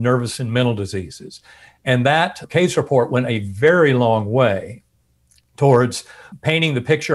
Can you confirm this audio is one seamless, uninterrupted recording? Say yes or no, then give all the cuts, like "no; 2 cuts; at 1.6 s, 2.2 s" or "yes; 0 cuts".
no; 2 cuts; at 2.4 s, 6.3 s